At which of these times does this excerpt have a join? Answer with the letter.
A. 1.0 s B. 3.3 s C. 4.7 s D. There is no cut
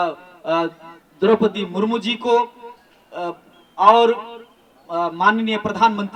D